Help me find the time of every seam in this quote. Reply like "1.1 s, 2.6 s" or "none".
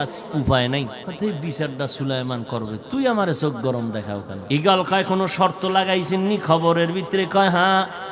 1.0 s, 4.3 s